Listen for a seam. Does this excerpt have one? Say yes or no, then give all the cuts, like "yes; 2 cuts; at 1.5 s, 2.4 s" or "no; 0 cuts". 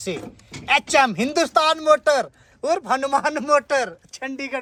no; 0 cuts